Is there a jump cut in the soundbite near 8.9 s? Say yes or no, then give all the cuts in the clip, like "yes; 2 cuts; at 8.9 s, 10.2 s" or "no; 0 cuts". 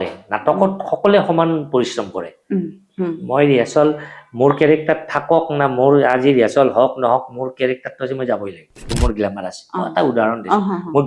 yes; 1 cut; at 8.9 s